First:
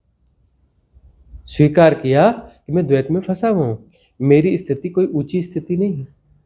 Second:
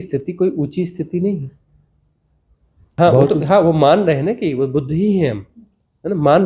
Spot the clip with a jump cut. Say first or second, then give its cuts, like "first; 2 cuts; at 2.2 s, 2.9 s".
second; 1 cut; at 3.0 s